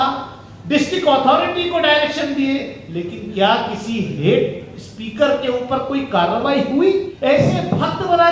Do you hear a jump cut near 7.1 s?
yes; 1 cut; at 7.1 s

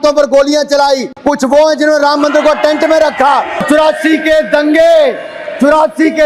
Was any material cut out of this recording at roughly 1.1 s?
yes; 2 cuts; at 1.1 s, 3.6 s

